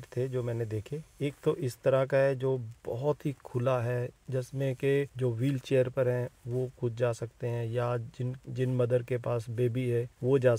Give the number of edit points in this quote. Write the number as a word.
zero